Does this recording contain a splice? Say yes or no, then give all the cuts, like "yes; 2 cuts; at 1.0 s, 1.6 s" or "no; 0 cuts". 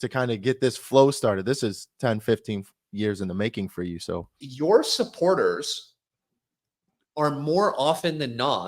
yes; 1 cut; at 4.4 s